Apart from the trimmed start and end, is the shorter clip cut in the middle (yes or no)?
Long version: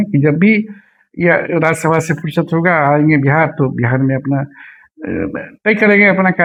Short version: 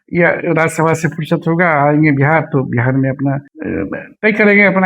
yes